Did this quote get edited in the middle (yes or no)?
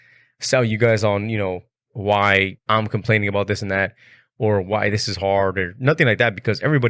yes